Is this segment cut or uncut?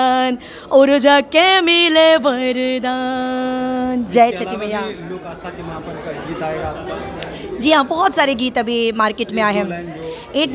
uncut